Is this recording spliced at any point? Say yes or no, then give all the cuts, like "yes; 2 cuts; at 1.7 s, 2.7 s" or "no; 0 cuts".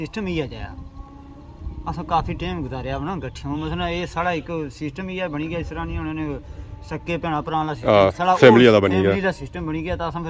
no; 0 cuts